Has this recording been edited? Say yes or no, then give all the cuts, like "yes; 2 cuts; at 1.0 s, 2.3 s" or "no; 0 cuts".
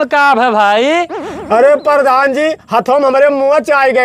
no; 0 cuts